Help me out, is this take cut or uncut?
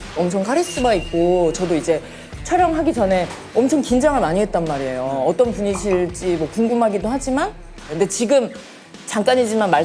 uncut